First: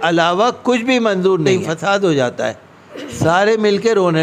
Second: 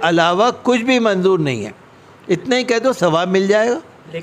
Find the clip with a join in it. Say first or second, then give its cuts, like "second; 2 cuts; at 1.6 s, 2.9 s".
first; 1 cut; at 1.4 s